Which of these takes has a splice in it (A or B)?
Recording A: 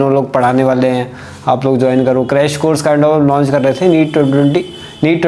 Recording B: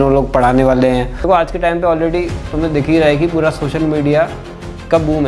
B